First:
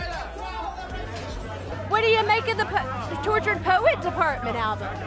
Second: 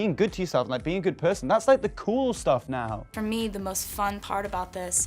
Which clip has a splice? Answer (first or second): second